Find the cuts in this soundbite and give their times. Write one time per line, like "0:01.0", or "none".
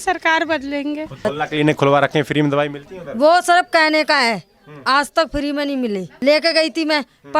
0:01.2
0:06.1